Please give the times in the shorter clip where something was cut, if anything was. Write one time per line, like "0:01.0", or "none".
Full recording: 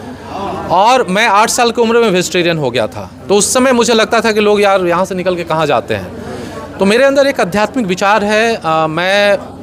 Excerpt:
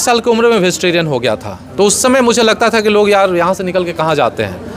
none